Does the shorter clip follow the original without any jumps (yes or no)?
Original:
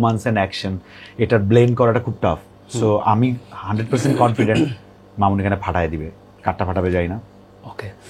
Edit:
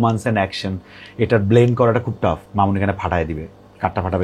no